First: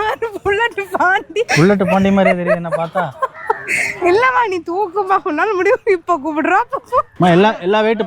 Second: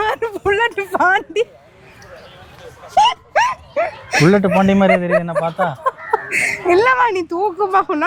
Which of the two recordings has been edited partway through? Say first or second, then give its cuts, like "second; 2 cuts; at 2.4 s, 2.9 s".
first; 2 cuts; at 1.5 s, 7.1 s